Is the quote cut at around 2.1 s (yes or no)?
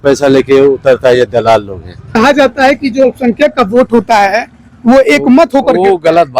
yes